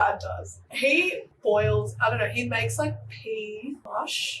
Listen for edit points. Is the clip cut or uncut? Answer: cut